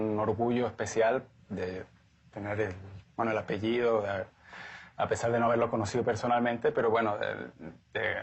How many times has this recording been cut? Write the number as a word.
one